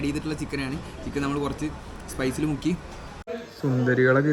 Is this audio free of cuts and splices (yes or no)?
no